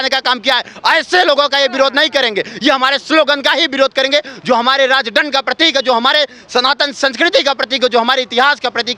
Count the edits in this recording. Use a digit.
0